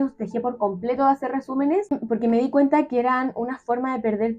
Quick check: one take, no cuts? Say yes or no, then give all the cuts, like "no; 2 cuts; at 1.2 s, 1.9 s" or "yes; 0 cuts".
no; 1 cut; at 1.9 s